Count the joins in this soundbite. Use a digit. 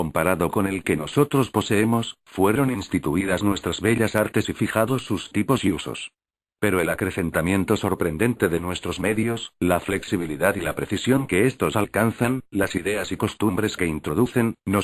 0